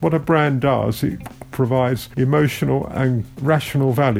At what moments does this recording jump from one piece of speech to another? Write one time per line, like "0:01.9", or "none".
0:02.1
0:03.3